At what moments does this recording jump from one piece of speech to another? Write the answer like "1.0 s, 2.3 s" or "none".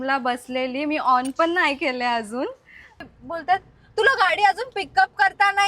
3.1 s